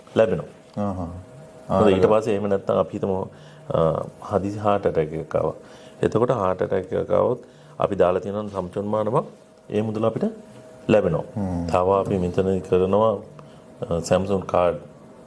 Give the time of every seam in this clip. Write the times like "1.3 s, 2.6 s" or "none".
11.6 s